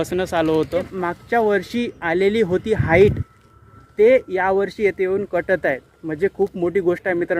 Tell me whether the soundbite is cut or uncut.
cut